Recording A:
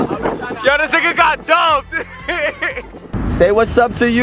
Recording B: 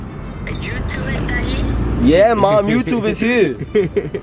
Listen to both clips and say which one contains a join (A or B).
A